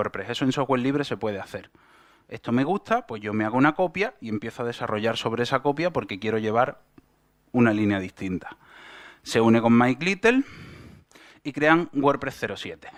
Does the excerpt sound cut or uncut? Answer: uncut